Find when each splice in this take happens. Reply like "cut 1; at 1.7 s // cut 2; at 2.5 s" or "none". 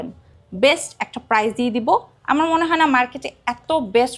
none